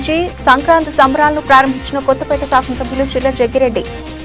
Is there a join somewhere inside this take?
no; 0 cuts

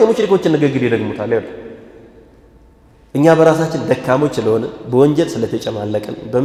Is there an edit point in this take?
no; 0 cuts

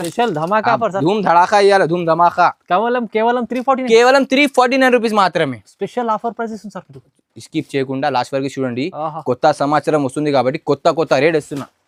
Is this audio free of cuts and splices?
yes; 0 cuts

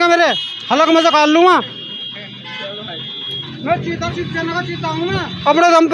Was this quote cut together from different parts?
no; 0 cuts

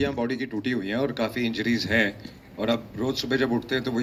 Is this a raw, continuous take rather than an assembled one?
yes; 0 cuts

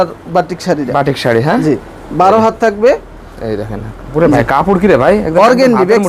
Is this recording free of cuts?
yes; 0 cuts

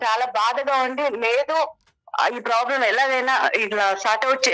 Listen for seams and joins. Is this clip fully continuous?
yes; 0 cuts

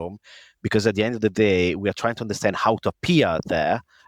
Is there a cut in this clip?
no; 0 cuts

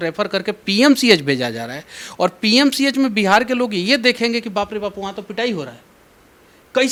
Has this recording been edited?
no; 0 cuts

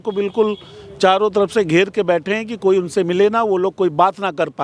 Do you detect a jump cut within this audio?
no; 0 cuts

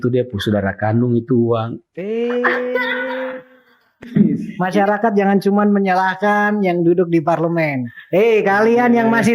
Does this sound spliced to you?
yes; 1 cut; at 4.5 s

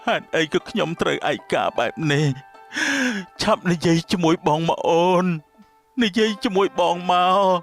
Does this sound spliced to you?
no; 0 cuts

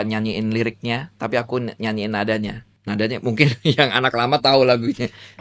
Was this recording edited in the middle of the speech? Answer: yes; 1 cut; at 2.7 s

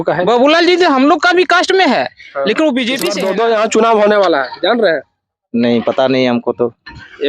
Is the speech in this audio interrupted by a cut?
yes; 1 cut; at 3.2 s

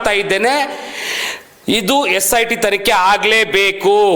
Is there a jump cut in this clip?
no; 0 cuts

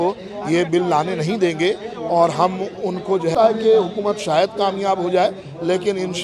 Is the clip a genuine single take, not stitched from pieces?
no; 1 cut; at 3.3 s

